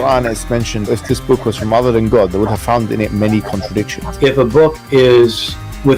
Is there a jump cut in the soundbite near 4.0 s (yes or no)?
no